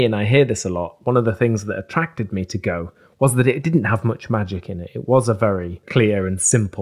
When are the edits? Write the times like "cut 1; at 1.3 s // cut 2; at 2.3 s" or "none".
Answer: cut 1; at 5.8 s